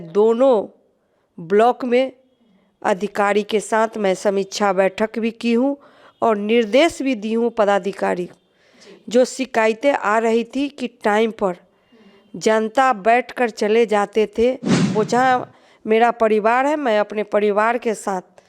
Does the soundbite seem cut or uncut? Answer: cut